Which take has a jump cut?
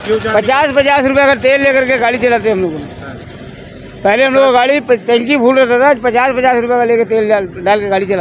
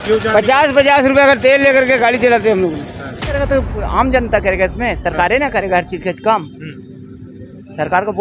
second; 1 cut; at 3.3 s

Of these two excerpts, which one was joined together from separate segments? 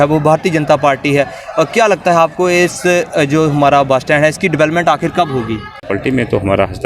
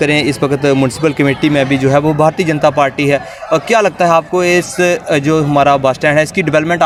first; 1 cut; at 5.8 s

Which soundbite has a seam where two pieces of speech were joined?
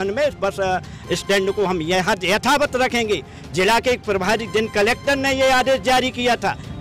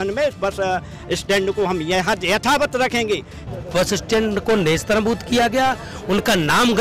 second; 1 cut; at 3.5 s

